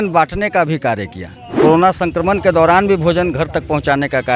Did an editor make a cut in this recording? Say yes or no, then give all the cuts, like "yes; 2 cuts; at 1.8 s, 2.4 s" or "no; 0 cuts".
yes; 1 cut; at 1.5 s